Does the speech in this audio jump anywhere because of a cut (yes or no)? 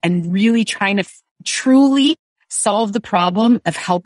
no